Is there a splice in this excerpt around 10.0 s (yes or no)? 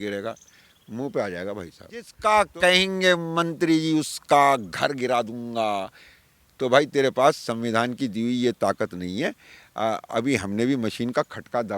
no